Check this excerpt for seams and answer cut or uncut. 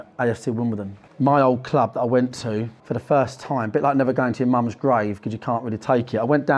cut